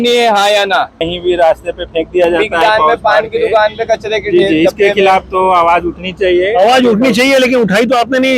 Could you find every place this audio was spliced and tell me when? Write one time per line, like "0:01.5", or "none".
none